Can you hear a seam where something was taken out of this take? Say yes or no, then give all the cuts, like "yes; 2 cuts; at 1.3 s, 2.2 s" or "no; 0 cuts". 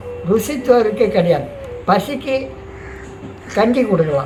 no; 0 cuts